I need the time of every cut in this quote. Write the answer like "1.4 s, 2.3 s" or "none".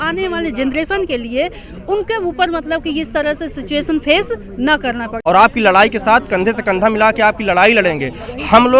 5.1 s